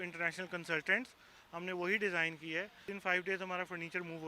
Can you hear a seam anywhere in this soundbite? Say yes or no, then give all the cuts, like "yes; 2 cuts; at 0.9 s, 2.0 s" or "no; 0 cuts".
yes; 1 cut; at 2.8 s